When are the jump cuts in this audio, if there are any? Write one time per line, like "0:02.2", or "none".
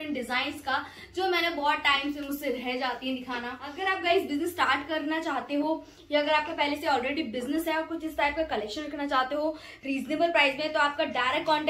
0:03.6